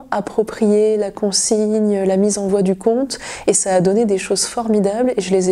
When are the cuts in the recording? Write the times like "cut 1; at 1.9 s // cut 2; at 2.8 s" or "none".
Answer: none